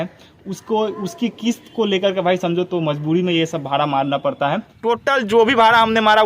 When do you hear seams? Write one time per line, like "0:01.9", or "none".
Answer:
0:04.7